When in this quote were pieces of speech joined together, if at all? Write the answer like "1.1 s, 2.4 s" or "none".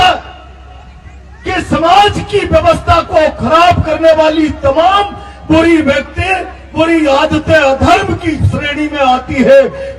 none